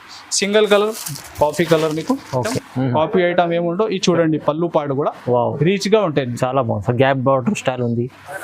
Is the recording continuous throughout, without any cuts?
no; 1 cut; at 2.6 s

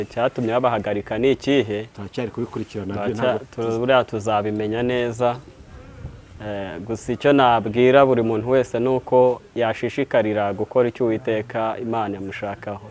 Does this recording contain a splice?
no; 0 cuts

